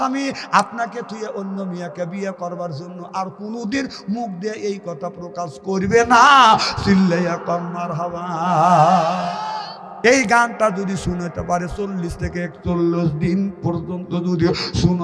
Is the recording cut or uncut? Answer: cut